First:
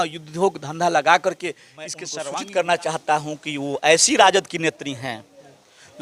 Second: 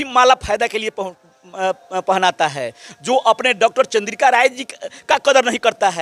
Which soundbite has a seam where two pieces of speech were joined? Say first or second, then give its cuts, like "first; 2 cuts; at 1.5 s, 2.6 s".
first; 1 cut; at 2.1 s